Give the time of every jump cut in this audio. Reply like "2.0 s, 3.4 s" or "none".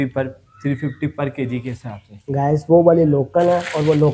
none